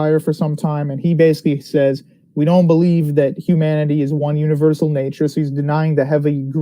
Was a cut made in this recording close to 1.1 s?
yes; 1 cut; at 1.1 s

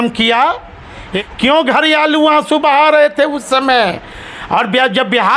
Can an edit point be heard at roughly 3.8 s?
no; 1 cut; at 1.1 s

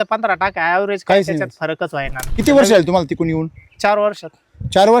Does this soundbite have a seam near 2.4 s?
yes; 1 cut; at 2.4 s

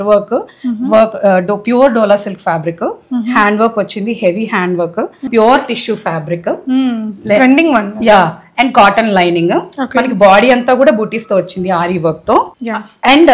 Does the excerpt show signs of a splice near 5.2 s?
yes; 1 cut; at 5.2 s

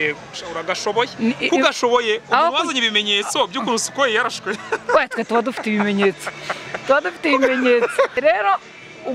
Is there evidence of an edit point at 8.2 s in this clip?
yes; 1 cut; at 8.2 s

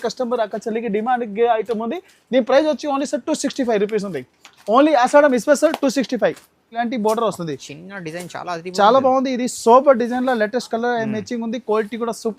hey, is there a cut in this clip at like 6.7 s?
yes; 1 cut; at 6.7 s

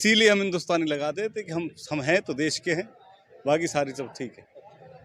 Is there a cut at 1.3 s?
no; 0 cuts

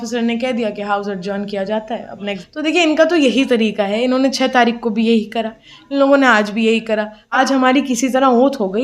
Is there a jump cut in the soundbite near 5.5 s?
no; 2 cuts; at 2.2 s, 7.2 s

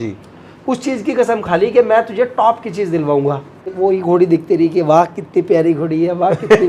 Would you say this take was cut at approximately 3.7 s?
yes; 1 cut; at 3.7 s

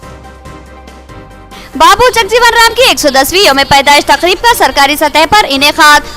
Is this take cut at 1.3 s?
yes; 1 cut; at 1.3 s

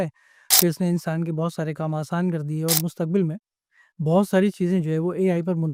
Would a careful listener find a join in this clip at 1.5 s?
no; 0 cuts

